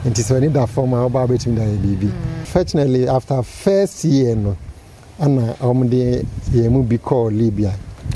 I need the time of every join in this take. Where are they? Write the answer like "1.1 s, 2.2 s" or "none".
2.5 s